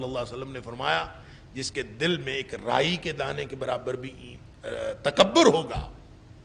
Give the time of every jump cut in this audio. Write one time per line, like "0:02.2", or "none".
none